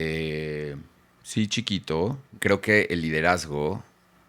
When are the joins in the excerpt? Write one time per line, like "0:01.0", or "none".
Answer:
0:02.3

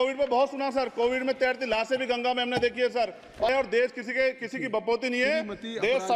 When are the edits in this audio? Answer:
0:03.5

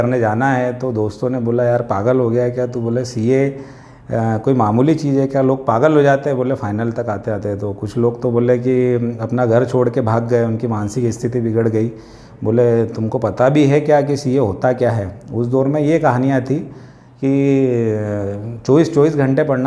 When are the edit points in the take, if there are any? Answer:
none

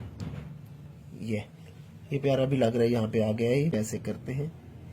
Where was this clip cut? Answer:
0:03.8

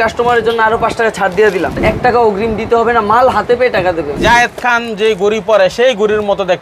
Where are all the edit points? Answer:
0:01.8
0:04.2

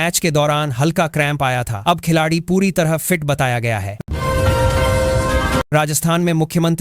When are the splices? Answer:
0:03.9
0:05.7

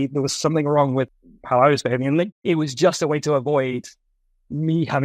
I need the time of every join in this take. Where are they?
0:01.1
0:02.3

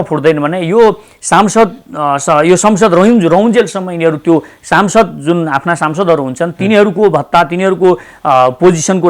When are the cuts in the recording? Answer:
none

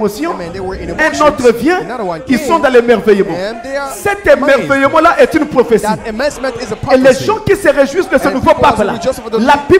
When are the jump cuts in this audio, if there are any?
none

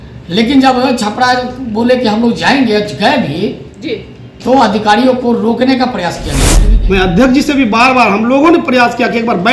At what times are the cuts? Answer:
0:06.7

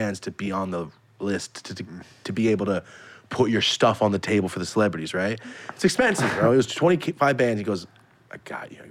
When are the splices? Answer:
none

